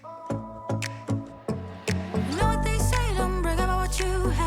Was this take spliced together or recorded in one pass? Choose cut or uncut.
cut